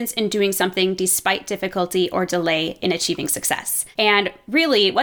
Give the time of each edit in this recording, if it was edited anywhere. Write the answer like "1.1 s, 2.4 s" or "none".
3.8 s